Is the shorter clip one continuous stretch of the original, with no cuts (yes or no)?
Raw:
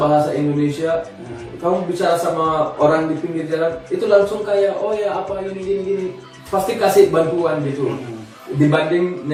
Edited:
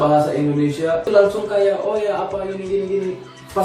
no